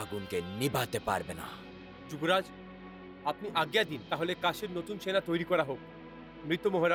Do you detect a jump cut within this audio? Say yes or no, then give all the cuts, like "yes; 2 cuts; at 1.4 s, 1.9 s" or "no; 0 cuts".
no; 0 cuts